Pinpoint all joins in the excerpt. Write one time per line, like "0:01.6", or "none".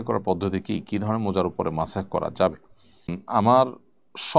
0:03.2